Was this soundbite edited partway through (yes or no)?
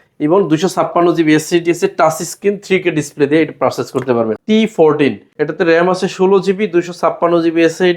yes